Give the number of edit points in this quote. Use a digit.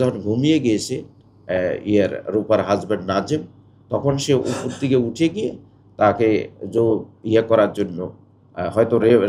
0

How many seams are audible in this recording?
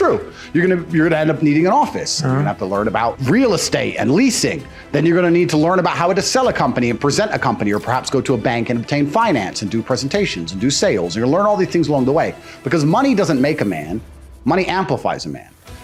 0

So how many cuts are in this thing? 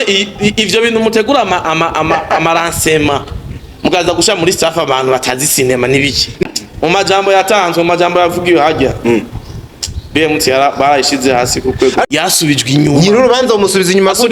2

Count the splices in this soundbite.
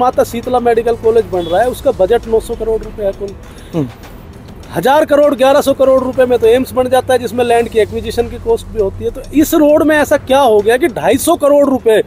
0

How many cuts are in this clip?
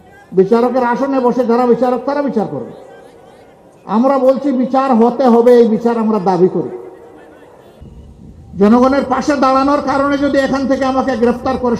1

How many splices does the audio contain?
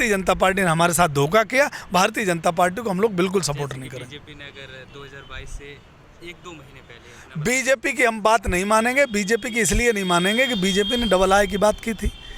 0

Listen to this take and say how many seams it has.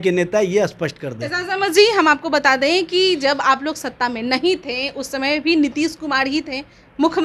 0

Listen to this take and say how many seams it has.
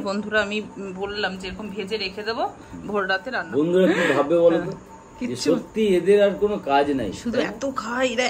1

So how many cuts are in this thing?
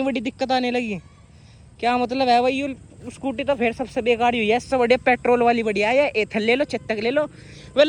0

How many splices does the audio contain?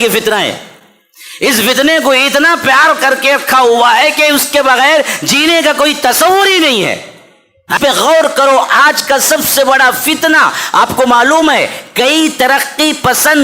1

